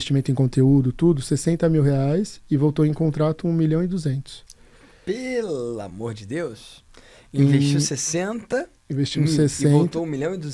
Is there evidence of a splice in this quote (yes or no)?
no